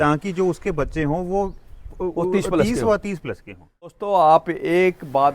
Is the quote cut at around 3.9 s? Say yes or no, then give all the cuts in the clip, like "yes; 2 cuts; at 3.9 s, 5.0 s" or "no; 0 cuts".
yes; 1 cut; at 3.9 s